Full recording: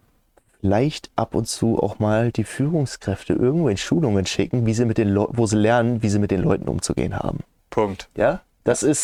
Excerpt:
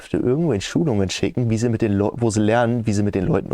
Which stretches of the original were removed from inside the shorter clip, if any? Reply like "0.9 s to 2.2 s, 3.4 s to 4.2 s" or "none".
none